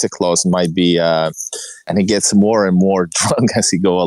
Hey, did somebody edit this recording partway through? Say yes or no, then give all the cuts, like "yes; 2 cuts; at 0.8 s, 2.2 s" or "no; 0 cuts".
yes; 1 cut; at 1.7 s